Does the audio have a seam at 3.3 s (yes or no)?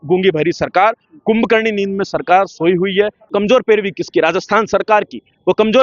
yes